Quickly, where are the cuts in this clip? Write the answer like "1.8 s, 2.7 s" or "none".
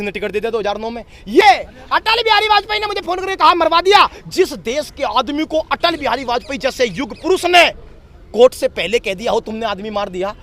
1.4 s